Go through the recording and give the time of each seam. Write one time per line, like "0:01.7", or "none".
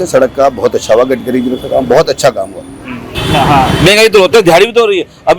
0:03.0